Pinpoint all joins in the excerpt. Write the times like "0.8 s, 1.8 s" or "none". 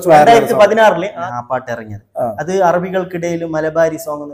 1.2 s

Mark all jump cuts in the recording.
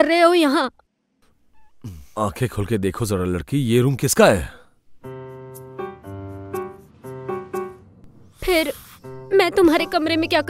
2.0 s

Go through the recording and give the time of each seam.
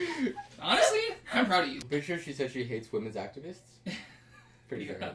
1.8 s

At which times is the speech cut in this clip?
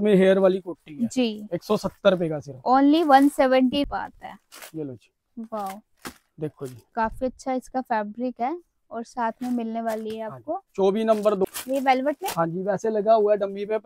3.8 s, 11.4 s

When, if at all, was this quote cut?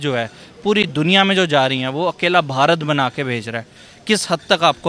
none

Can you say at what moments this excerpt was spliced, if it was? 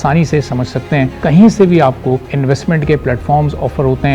1.2 s, 2.3 s

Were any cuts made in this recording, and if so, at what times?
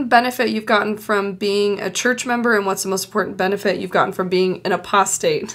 none

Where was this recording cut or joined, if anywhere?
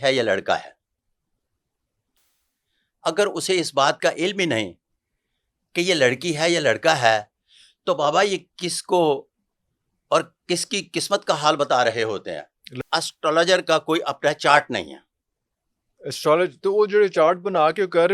12.7 s

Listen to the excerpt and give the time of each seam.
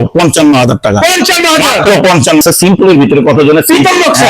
2.4 s

